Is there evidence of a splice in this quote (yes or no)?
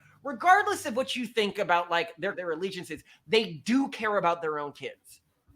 yes